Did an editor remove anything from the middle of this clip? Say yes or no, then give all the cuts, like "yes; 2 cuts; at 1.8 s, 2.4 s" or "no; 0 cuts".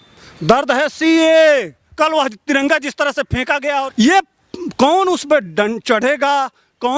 yes; 2 cuts; at 1.8 s, 3.9 s